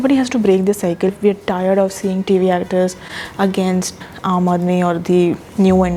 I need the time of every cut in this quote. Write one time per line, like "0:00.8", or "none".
0:01.1
0:04.0